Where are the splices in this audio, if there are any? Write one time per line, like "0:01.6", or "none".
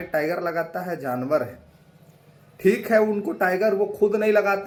none

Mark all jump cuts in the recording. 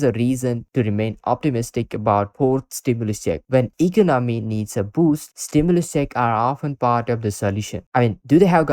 0:03.4

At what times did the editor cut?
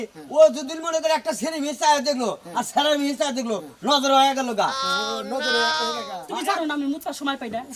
0:06.2

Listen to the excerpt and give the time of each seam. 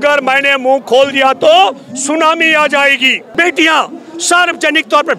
0:03.2

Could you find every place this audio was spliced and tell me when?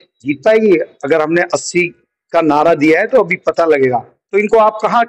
none

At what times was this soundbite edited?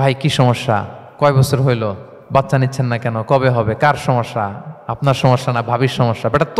0:01.0
0:02.1

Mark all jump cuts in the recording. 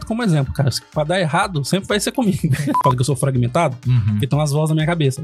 0:02.8

